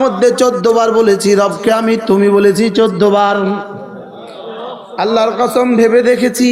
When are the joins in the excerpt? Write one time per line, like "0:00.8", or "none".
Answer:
none